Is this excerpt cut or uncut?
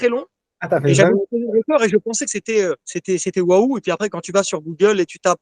cut